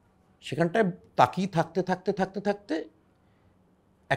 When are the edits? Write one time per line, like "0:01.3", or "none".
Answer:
none

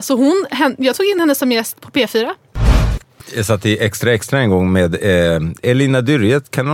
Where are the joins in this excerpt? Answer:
0:02.8
0:05.6

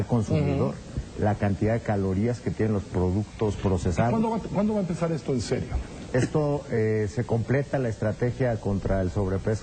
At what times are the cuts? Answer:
none

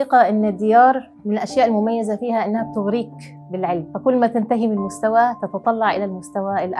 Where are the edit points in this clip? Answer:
0:01.1
0:03.9

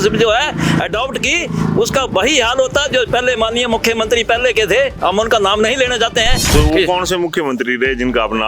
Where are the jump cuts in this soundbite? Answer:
0:06.4

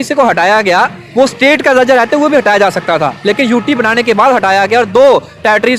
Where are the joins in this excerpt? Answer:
none

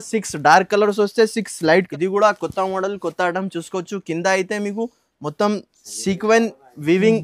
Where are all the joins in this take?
0:01.9

